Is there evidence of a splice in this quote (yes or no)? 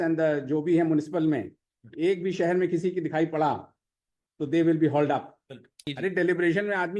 yes